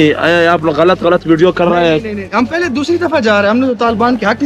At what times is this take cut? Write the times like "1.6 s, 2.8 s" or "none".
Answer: none